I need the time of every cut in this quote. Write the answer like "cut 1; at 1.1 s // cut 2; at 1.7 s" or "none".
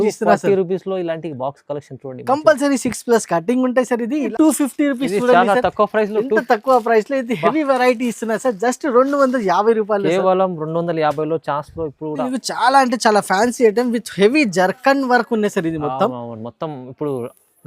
cut 1; at 4.3 s // cut 2; at 12.2 s